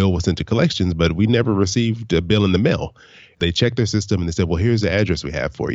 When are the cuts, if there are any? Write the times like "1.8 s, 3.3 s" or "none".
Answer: 3.4 s